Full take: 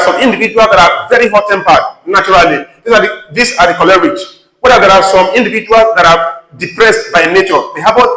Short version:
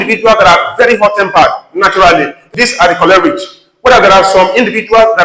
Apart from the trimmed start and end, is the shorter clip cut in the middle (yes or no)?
yes